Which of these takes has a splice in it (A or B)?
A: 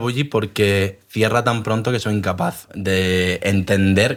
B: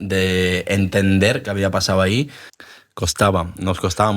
B